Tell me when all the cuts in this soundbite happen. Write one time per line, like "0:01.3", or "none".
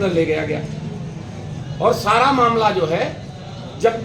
none